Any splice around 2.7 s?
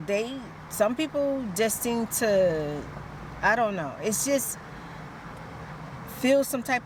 no; 0 cuts

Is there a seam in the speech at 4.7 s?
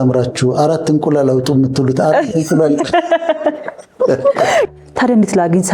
yes; 1 cut; at 4.7 s

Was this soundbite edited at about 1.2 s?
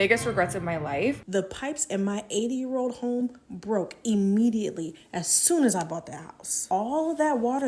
yes; 2 cuts; at 1.2 s, 6.6 s

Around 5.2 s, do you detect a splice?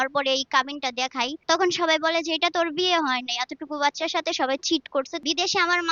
yes; 2 cuts; at 1.4 s, 5.2 s

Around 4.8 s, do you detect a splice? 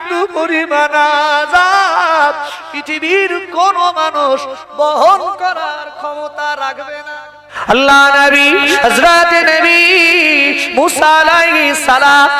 no; 1 cut; at 7.5 s

